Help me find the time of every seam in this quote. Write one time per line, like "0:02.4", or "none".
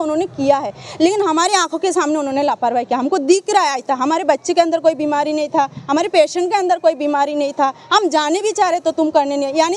none